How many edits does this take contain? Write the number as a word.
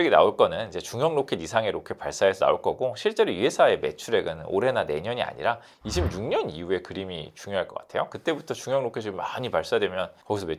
zero